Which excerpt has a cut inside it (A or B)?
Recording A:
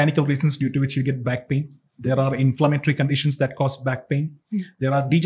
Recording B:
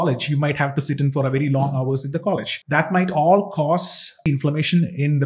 B